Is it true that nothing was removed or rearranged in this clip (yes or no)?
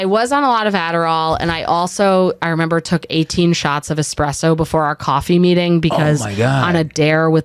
yes